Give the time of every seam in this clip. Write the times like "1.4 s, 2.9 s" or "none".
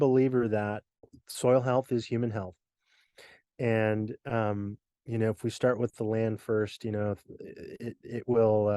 1.1 s